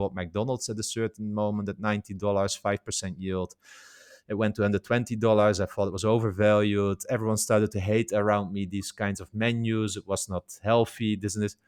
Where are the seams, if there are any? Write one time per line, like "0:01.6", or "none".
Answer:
none